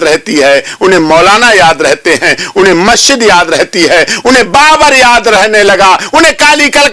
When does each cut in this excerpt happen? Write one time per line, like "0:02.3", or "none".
none